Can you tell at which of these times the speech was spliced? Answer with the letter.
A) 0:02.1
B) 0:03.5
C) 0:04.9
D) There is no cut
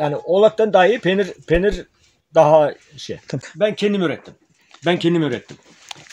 B